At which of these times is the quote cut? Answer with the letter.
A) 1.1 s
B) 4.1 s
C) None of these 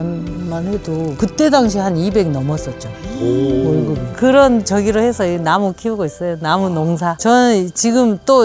B